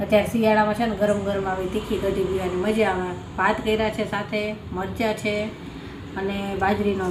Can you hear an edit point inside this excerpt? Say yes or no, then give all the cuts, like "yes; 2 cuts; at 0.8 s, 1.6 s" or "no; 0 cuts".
no; 0 cuts